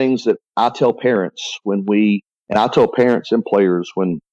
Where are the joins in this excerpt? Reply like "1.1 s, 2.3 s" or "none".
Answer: 2.3 s